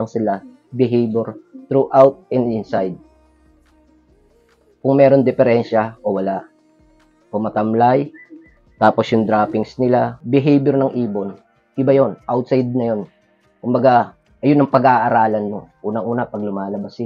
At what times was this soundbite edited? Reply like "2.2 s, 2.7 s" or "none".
10.2 s